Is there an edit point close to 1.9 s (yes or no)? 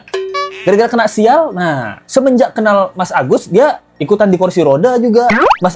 yes